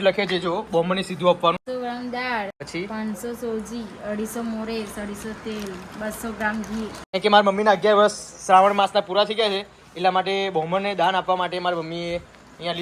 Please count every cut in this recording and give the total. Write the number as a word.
three